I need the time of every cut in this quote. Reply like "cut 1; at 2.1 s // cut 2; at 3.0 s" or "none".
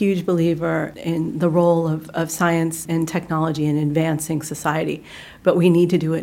cut 1; at 0.9 s // cut 2; at 2.8 s

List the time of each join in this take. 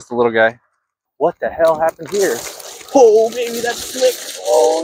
cut 1; at 1.0 s

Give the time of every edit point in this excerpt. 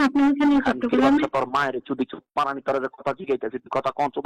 none

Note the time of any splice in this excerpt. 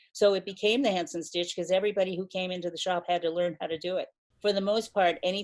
cut 1; at 4.2 s

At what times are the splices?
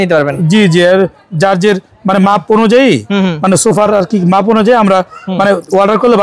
none

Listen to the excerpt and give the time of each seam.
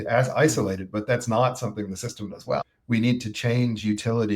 cut 1; at 2.7 s

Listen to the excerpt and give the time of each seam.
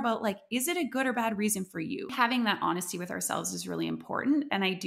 cut 1; at 2.1 s

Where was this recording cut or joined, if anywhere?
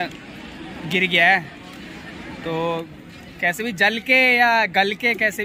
none

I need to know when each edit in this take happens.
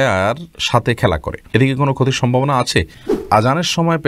cut 1; at 1.3 s // cut 2; at 3.1 s

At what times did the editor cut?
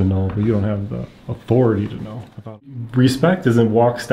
cut 1; at 2.6 s

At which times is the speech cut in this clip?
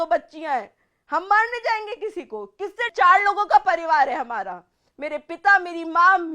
cut 1; at 2.9 s

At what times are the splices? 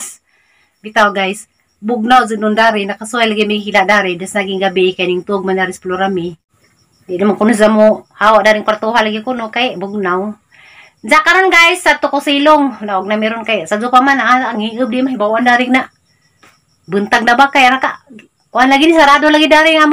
cut 1; at 6.5 s

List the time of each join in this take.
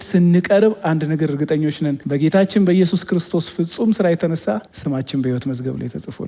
cut 1; at 2.0 s // cut 2; at 4.7 s

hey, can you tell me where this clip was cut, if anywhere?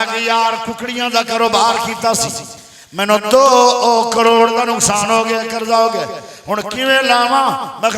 none

